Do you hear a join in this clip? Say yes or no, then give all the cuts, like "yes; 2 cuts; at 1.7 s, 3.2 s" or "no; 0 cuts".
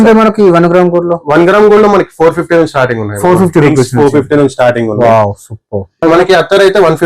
yes; 1 cut; at 6.0 s